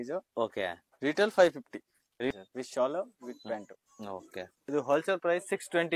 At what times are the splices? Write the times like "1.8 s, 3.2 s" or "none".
2.3 s, 4.5 s

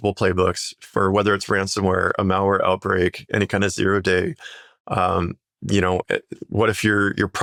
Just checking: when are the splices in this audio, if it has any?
none

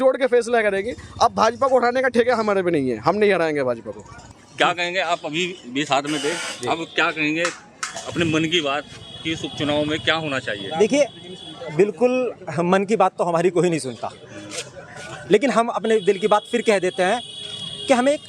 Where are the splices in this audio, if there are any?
none

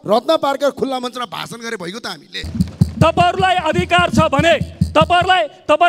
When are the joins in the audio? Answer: 2.4 s

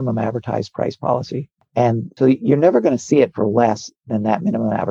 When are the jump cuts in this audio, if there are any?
2.1 s

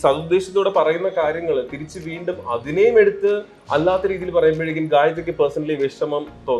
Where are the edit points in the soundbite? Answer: none

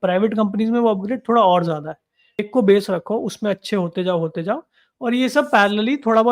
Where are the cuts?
2.5 s

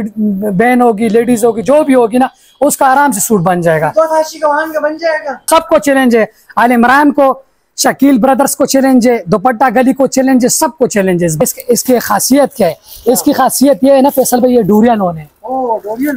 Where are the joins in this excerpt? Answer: 5.5 s, 11.4 s

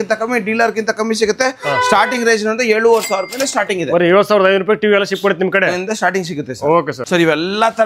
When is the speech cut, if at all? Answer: none

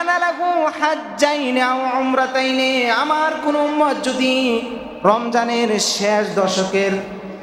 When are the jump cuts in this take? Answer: none

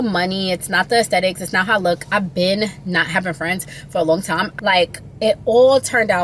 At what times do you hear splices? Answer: 4.6 s

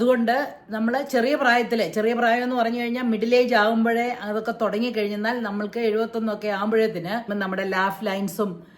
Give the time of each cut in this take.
7.3 s

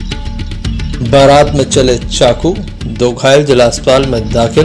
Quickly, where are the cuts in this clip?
none

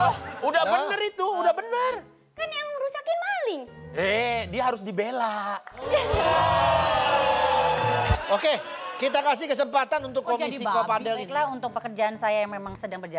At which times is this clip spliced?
8.1 s, 11.3 s

